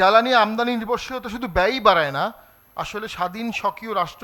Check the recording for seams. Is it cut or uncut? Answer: uncut